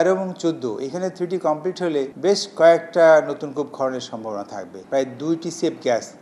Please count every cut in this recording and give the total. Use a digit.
2